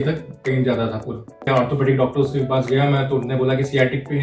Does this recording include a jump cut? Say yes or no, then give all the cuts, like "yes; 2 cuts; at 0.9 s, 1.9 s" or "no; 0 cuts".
yes; 1 cut; at 1.4 s